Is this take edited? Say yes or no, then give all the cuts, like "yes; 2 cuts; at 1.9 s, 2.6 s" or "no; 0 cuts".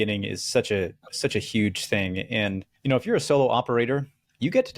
yes; 1 cut; at 2.7 s